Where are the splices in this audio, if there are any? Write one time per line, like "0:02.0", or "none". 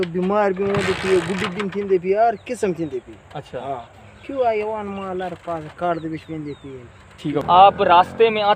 none